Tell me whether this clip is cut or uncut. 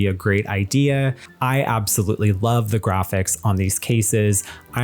cut